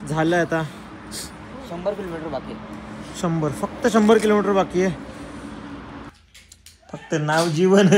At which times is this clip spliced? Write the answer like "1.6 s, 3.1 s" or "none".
6.1 s